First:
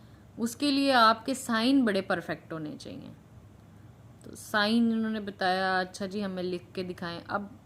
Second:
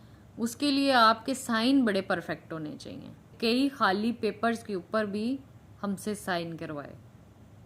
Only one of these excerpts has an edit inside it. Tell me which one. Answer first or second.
second